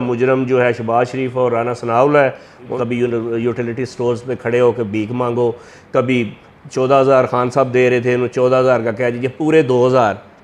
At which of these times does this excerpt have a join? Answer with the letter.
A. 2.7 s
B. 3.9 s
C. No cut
A